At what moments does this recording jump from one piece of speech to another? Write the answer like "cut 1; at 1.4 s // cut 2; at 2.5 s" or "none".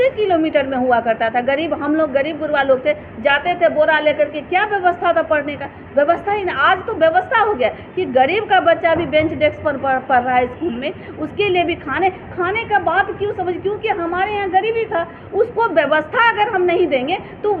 none